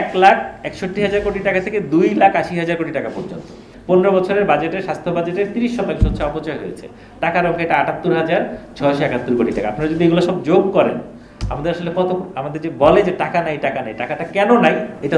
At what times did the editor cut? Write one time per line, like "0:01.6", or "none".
0:03.7